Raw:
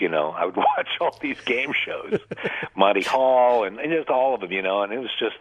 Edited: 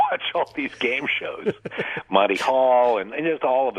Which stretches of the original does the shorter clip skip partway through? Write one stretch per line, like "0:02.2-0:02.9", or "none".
none